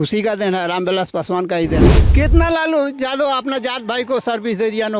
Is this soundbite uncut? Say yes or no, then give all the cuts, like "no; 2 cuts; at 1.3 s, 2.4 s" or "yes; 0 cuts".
no; 1 cut; at 2.0 s